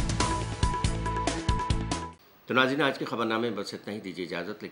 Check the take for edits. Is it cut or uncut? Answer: uncut